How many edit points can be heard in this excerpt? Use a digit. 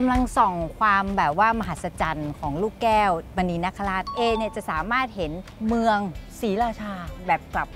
3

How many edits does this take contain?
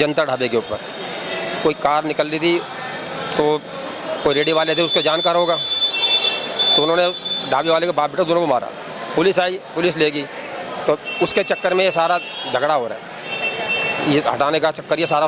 0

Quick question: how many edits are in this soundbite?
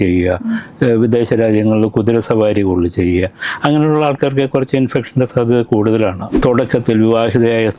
1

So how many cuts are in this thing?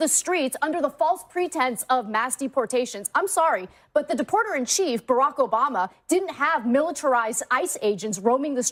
0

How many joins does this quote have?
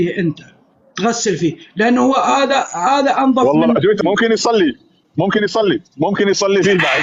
1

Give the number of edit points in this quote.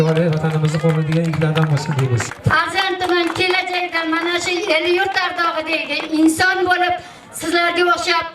1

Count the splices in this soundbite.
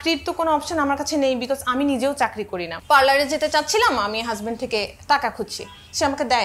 1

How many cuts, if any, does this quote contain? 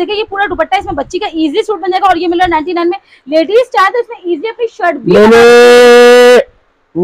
0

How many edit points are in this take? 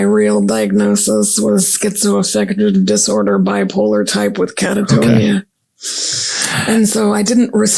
0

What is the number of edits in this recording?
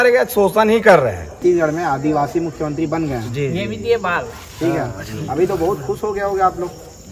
1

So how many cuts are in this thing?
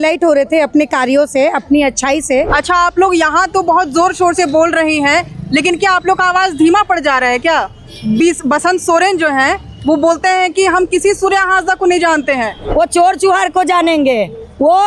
2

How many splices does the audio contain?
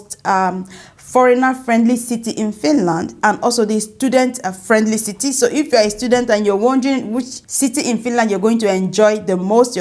1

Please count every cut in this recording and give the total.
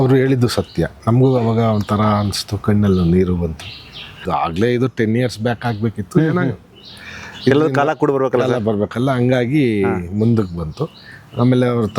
1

